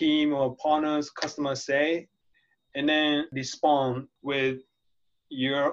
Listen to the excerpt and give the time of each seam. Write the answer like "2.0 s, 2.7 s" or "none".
3.3 s, 4.1 s